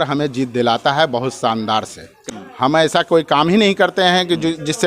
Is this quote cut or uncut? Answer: cut